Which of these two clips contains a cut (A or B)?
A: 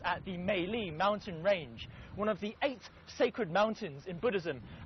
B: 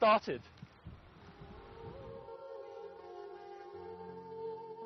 B